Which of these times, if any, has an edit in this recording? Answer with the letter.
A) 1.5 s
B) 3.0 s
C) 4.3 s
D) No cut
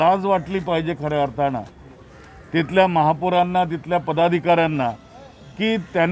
D